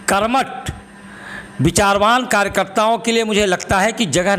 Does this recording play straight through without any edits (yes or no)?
yes